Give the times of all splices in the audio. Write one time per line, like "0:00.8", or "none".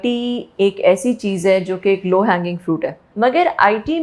0:03.1